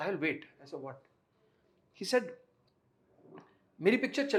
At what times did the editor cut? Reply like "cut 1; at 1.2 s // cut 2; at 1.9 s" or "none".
none